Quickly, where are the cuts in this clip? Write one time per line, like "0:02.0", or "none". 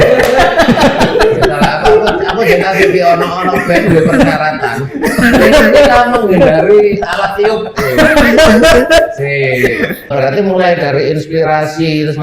0:10.1